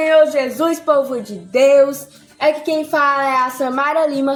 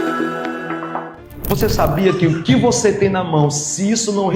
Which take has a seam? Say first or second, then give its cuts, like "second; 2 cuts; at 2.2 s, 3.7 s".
second; 1 cut; at 1.2 s